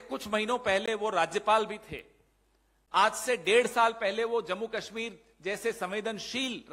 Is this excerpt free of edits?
yes; 0 cuts

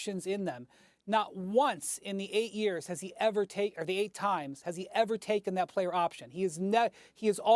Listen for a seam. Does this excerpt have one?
no; 0 cuts

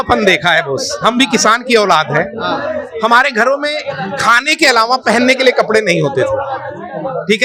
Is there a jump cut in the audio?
no; 0 cuts

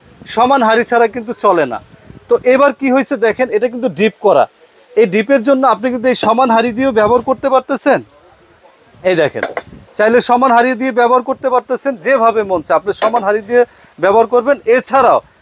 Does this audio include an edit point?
no; 0 cuts

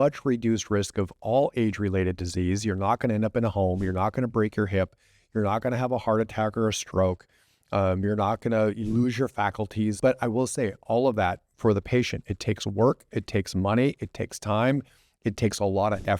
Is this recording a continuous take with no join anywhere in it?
no; 2 cuts; at 8.0 s, 10.0 s

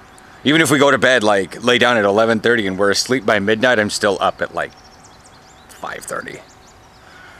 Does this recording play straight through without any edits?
yes; 0 cuts

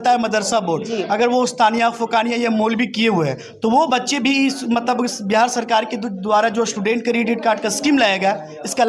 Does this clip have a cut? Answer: no; 0 cuts

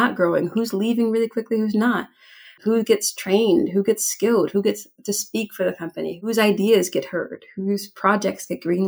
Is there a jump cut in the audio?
no; 0 cuts

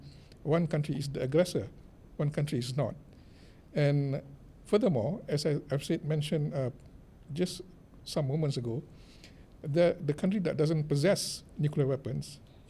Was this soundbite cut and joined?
no; 0 cuts

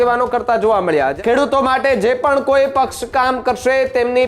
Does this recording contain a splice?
yes; 1 cut; at 1.1 s

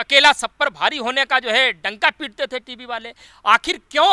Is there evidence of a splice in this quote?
no; 0 cuts

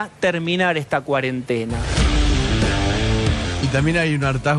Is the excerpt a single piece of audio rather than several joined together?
no; 1 cut; at 3.6 s

